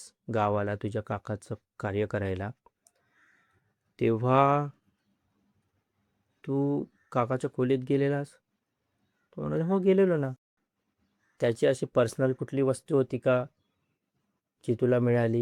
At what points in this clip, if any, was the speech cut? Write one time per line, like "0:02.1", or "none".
0:10.4